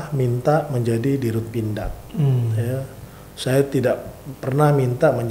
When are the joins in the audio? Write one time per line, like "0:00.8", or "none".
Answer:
none